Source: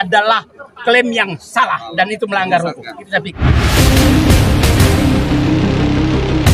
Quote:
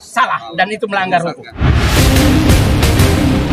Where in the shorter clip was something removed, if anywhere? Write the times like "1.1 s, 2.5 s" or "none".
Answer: 1.5 s